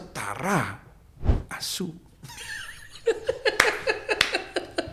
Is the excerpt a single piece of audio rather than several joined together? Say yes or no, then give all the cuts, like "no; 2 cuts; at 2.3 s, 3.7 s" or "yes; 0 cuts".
yes; 0 cuts